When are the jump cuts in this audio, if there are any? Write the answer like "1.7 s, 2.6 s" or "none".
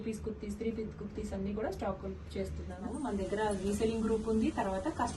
2.9 s